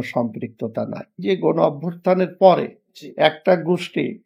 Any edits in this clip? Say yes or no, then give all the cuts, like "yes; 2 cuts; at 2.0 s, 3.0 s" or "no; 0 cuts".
yes; 1 cut; at 1.2 s